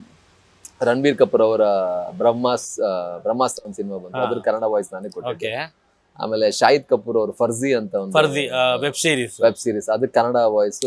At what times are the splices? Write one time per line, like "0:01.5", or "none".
none